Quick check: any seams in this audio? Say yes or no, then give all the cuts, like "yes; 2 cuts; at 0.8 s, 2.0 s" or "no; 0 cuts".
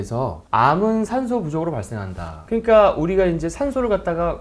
yes; 1 cut; at 2.3 s